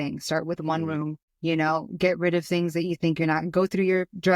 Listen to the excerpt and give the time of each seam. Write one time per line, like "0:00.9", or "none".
0:01.2